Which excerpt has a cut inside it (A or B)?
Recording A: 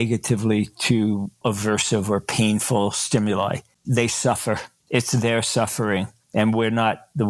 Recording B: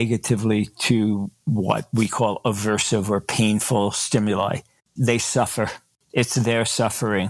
A